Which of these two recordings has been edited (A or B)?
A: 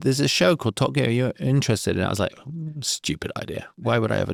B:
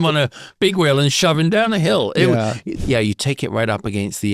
B